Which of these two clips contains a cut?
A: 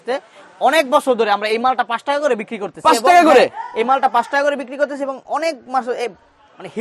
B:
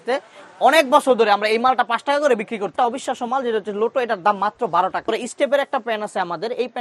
B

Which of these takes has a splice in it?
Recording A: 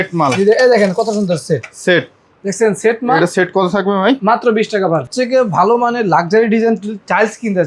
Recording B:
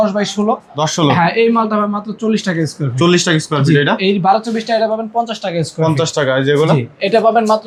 A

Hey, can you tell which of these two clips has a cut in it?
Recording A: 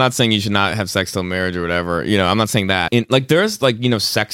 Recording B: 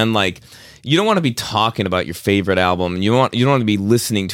A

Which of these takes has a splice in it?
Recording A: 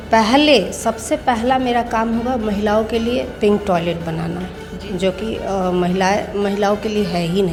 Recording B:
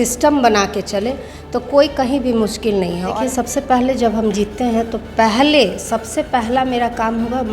B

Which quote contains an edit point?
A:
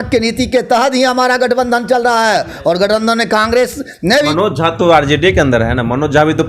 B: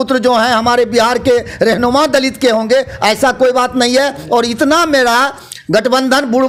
A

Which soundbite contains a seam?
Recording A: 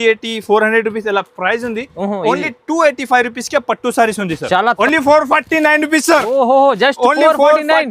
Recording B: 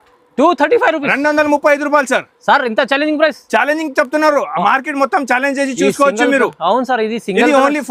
A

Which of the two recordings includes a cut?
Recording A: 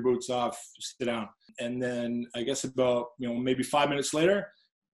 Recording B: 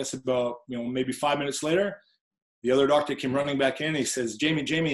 A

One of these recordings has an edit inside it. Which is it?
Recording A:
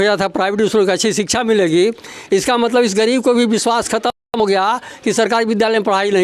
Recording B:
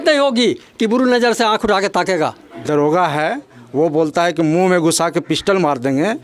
B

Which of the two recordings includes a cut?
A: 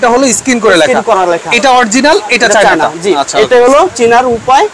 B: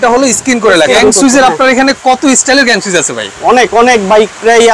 B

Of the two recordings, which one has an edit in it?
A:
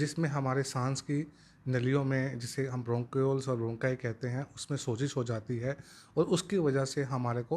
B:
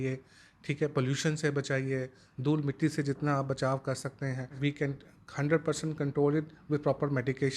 B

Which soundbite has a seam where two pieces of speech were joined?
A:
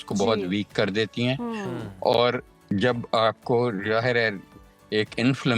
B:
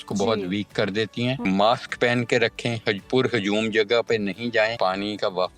B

